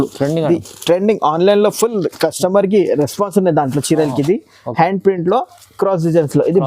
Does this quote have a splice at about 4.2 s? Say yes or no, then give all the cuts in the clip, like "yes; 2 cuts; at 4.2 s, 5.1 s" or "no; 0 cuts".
no; 0 cuts